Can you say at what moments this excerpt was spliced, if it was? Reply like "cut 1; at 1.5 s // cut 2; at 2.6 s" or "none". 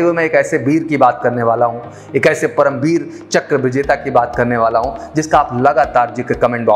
none